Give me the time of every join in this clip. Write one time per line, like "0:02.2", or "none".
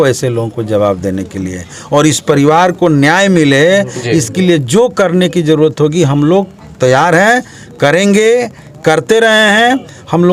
none